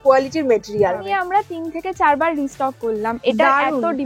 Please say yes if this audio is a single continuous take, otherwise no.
no